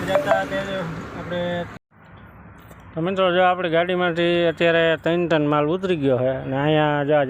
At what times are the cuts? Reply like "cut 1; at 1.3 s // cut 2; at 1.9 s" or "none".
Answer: cut 1; at 1.7 s